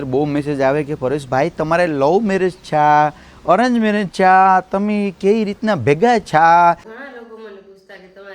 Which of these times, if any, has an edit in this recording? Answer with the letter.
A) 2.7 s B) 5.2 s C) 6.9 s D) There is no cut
C